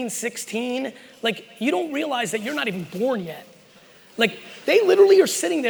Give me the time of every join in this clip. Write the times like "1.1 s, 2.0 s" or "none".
none